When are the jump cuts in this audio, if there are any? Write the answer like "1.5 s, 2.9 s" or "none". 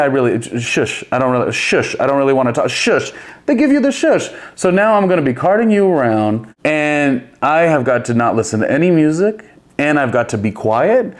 6.5 s